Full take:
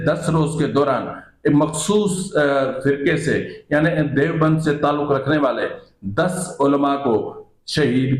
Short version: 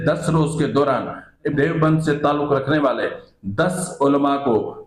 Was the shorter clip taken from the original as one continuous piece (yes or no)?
no